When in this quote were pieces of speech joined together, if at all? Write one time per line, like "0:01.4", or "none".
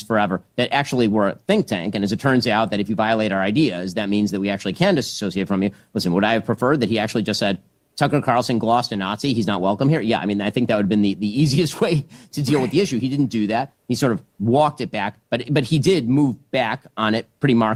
none